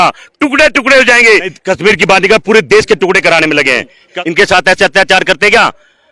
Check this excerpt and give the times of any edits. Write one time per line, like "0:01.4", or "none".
0:01.6
0:04.1